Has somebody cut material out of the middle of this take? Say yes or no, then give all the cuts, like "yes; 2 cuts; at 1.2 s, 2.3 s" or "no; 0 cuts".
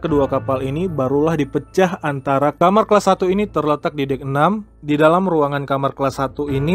yes; 2 cuts; at 2.5 s, 4.7 s